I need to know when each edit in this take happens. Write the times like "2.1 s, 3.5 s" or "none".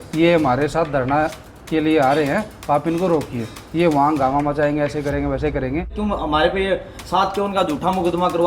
5.9 s

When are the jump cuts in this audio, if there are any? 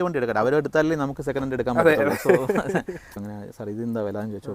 3.2 s

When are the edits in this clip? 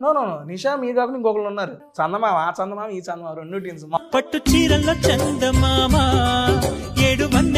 1.8 s, 4.0 s

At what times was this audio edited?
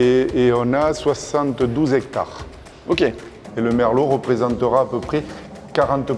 3.4 s

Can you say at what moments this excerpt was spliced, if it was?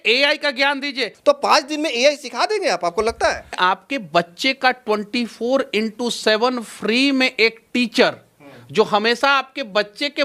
1.1 s, 3.6 s

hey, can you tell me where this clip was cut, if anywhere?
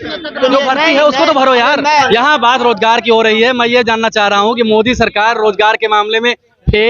2.1 s

